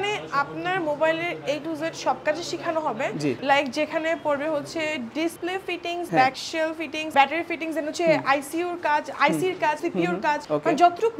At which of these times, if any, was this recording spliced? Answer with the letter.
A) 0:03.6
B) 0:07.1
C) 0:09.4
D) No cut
B